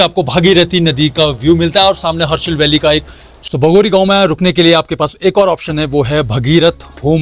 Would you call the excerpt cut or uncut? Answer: cut